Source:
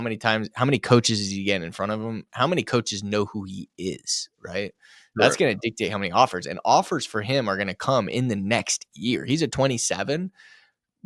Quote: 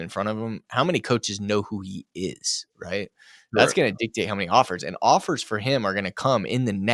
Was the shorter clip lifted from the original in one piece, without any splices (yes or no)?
yes